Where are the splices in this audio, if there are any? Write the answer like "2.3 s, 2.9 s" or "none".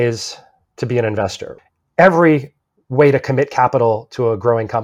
1.6 s, 2.6 s